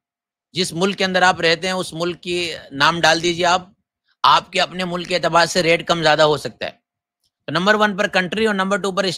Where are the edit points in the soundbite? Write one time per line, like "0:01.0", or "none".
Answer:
none